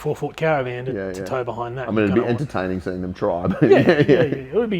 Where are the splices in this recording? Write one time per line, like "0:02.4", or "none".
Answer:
none